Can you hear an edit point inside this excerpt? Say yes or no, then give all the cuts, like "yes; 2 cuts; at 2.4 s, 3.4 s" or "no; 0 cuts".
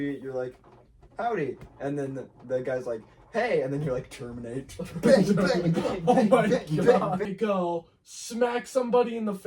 yes; 1 cut; at 7.3 s